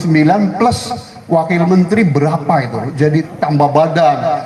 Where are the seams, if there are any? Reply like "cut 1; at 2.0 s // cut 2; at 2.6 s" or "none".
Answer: cut 1; at 3.2 s